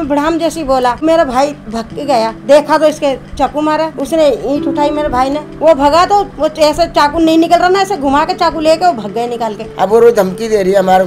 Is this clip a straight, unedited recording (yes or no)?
no